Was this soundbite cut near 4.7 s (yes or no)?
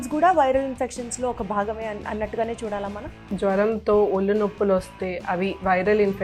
no